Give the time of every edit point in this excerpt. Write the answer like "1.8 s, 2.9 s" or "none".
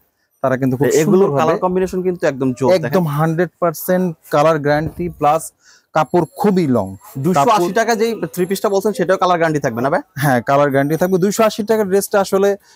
none